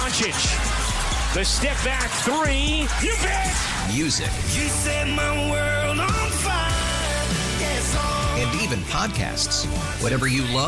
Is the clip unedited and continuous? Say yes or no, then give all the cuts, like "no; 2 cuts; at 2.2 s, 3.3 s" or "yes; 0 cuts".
yes; 0 cuts